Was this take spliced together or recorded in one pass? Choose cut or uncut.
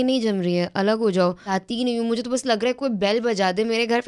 cut